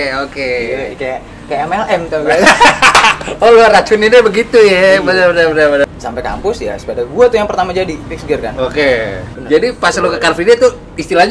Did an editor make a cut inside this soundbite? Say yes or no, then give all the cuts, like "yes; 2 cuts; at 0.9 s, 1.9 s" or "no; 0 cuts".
yes; 2 cuts; at 5.8 s, 9.3 s